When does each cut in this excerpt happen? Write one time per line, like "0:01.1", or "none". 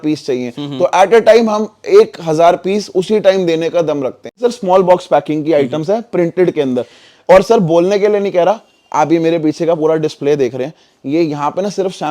0:04.4

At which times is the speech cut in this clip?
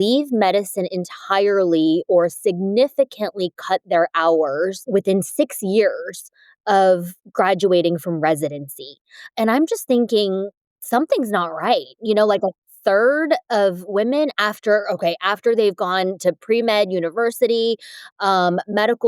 0:04.8

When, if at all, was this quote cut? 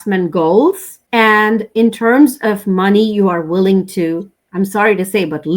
0:00.9

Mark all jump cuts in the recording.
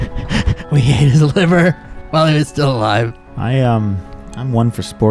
0:03.3

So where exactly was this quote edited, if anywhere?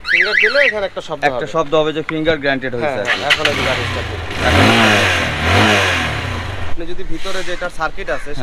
0:06.6

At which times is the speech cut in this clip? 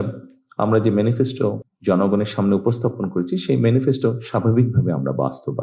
0:01.7

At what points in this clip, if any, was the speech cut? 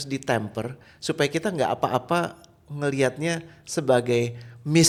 none

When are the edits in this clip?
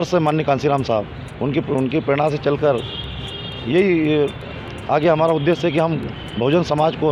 none

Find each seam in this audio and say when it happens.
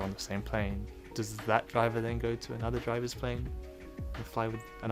0:01.0

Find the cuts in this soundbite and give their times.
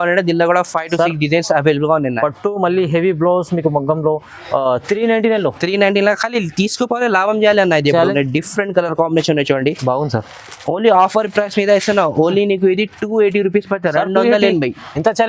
0:08.1

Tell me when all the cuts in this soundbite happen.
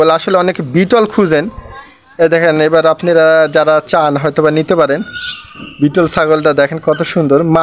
none

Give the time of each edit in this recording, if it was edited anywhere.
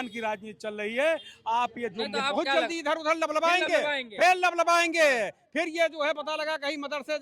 0:02.2

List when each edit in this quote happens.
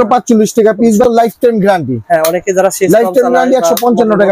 0:01.2

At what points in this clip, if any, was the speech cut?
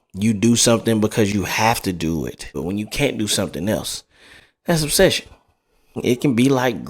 0:02.5
0:06.0

